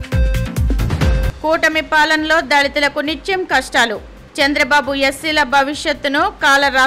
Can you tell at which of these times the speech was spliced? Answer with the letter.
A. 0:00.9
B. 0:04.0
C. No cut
A